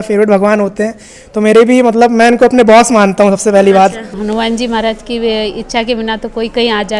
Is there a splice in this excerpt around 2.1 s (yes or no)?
no